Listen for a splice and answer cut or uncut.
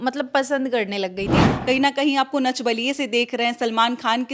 cut